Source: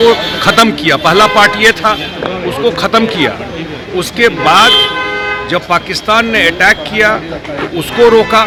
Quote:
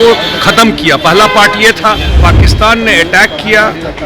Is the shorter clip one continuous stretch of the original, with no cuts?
no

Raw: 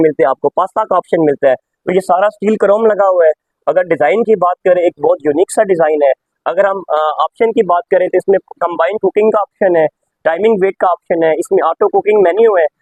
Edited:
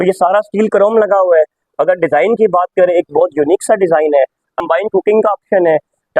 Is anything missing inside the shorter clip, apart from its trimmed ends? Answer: yes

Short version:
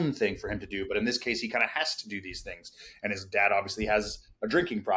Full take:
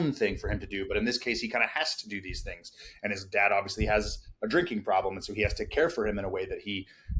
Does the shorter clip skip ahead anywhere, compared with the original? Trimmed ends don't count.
no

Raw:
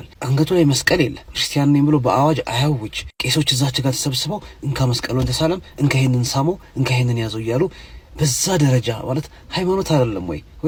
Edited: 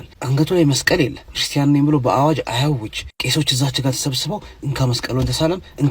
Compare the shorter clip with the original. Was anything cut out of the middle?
no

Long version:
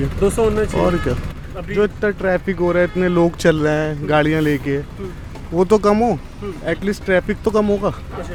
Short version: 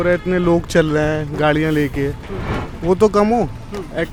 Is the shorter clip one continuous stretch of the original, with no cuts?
yes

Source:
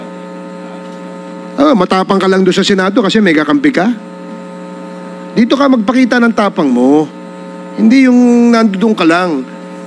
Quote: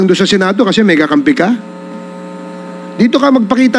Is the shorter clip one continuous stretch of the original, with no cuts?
yes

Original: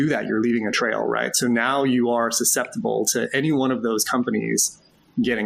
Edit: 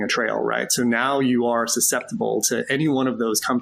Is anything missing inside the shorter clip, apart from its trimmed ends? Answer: no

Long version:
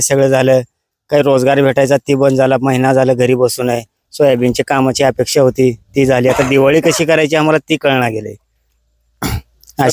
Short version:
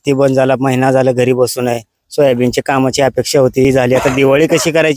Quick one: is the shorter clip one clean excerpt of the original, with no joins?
no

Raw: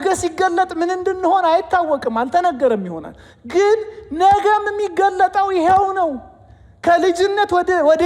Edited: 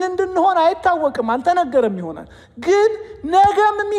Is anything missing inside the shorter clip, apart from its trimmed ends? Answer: no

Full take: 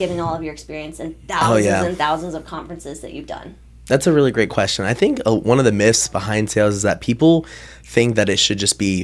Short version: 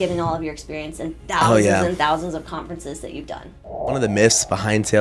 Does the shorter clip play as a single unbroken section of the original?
no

